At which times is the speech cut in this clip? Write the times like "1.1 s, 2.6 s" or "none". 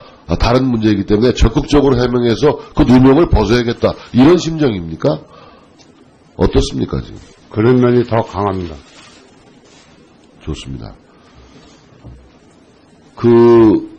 none